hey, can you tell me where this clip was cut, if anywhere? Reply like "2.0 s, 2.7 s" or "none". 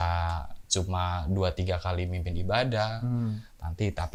none